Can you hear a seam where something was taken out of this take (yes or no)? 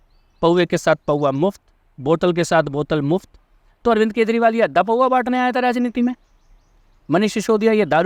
no